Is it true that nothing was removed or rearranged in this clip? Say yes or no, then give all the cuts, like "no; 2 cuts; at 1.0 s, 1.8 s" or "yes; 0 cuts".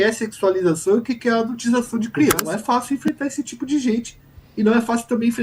no; 1 cut; at 2.4 s